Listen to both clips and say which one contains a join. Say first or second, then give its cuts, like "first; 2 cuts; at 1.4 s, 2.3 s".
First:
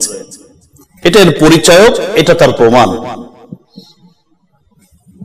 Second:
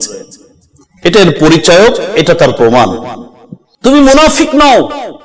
second; 1 cut; at 3.8 s